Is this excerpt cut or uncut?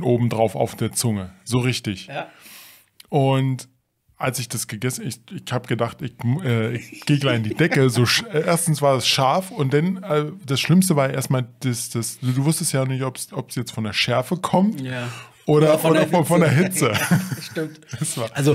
uncut